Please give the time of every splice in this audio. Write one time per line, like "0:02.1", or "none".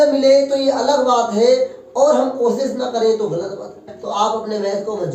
0:04.0